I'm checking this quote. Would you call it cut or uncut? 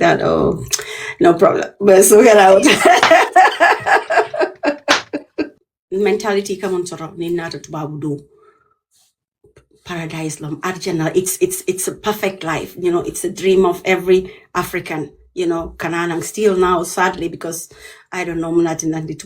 cut